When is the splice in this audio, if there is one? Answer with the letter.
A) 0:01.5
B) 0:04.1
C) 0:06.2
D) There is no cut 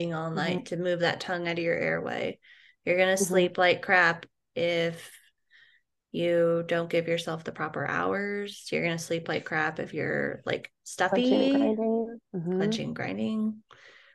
D